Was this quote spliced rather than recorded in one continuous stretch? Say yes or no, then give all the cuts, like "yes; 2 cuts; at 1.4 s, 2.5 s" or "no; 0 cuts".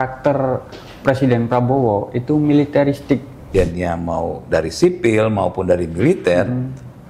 yes; 1 cut; at 3.4 s